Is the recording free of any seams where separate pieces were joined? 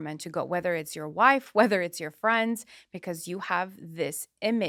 yes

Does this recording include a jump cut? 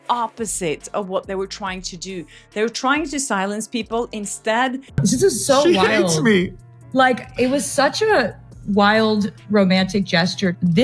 yes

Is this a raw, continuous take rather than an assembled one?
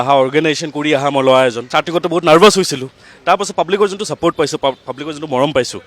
no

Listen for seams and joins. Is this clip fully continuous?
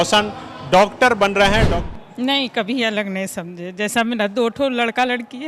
no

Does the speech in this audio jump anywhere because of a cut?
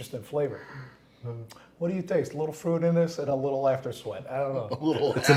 no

